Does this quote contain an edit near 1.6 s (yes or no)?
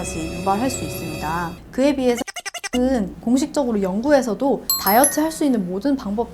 yes